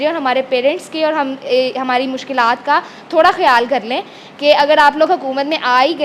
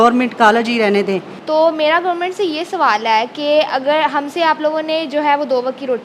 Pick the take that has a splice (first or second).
second